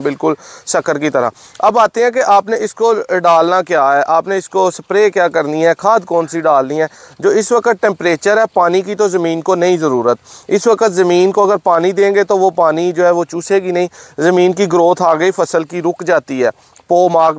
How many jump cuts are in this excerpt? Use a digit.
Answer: 0